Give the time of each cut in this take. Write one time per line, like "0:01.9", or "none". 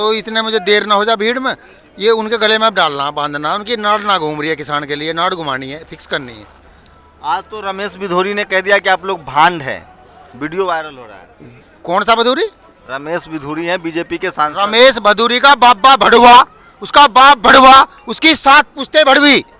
none